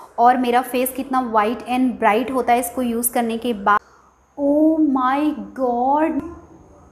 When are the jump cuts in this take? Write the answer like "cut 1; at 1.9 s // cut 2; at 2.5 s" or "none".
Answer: cut 1; at 3.8 s